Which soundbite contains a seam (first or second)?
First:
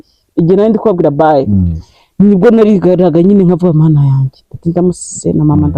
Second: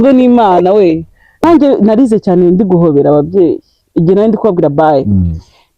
second